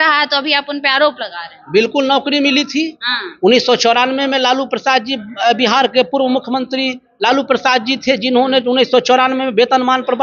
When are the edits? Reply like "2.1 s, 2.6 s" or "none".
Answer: none